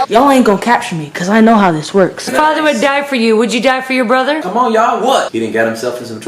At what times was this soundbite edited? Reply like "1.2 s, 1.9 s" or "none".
2.3 s, 4.4 s, 5.3 s